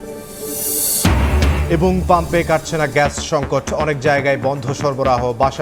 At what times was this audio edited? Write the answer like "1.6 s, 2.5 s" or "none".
none